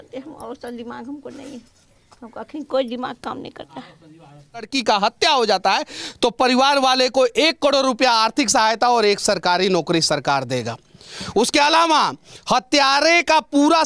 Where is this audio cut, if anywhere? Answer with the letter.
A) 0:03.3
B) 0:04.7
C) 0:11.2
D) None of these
B